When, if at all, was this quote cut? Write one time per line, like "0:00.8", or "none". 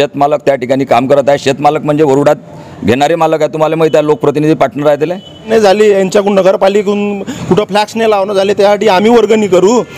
0:05.5